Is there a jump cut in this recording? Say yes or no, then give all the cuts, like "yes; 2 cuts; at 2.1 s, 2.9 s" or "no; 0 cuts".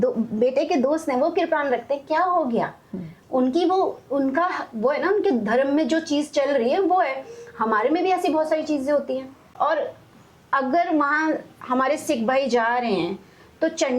yes; 1 cut; at 9.4 s